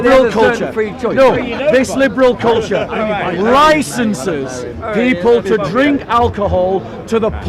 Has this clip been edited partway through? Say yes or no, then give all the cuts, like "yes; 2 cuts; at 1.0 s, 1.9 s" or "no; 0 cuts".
no; 0 cuts